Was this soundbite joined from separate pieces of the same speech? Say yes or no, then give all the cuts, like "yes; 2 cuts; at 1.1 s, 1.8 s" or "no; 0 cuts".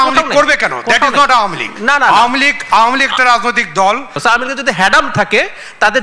yes; 1 cut; at 4.2 s